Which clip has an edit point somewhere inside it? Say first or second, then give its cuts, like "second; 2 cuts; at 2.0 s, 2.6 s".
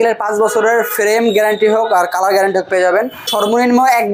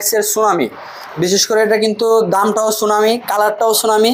first; 1 cut; at 3.2 s